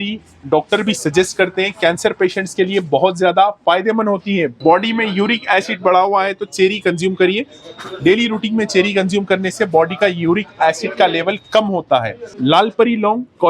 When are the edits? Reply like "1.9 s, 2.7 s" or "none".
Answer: 4.5 s, 12.3 s